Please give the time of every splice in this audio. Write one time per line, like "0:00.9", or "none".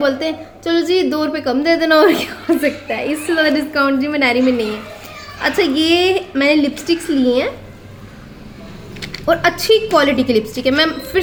none